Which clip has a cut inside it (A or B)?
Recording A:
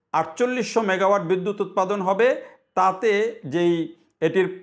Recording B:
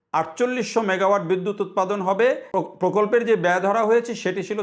B